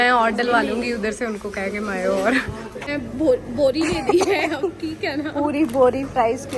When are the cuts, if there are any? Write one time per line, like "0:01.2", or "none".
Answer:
0:02.8
0:05.6